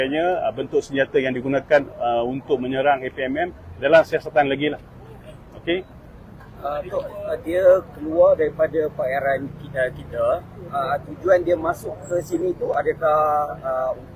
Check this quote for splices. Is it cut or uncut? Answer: uncut